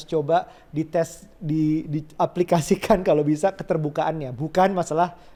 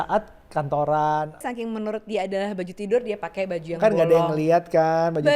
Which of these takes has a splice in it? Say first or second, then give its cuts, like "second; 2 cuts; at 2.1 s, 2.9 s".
second; 1 cut; at 1.4 s